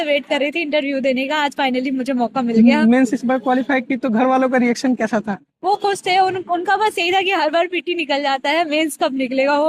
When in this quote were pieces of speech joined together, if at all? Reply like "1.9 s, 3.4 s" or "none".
none